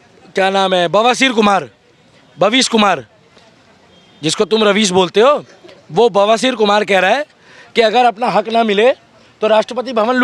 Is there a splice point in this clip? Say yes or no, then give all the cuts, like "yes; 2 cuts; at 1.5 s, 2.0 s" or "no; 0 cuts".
no; 0 cuts